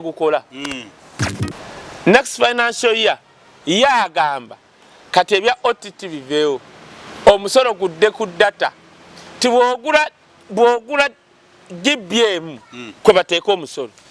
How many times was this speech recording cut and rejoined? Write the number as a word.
one